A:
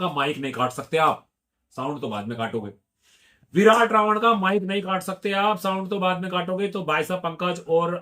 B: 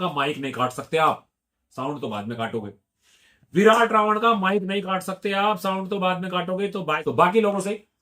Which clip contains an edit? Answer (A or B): B